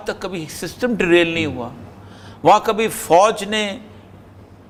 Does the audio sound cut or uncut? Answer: uncut